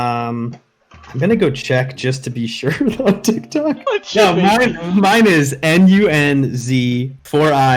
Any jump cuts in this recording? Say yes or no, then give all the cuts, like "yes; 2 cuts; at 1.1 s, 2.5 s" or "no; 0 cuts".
yes; 1 cut; at 3.9 s